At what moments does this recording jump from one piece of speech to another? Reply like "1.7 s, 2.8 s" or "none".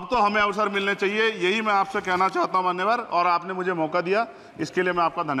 none